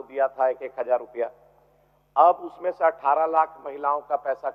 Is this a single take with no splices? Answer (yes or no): yes